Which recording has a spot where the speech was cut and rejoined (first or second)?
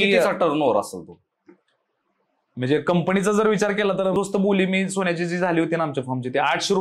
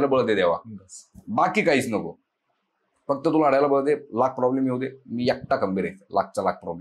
first